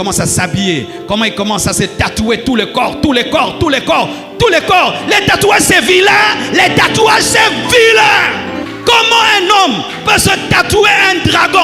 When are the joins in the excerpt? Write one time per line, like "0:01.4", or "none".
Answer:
0:08.5